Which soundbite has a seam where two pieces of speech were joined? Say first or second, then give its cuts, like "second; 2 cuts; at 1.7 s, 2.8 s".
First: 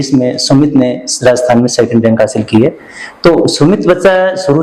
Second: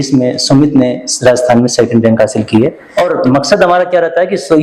second; 1 cut; at 2.8 s